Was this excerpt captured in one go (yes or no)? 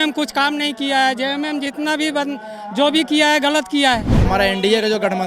no